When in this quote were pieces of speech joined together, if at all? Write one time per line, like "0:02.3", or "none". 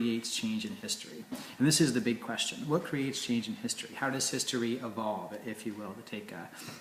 0:01.4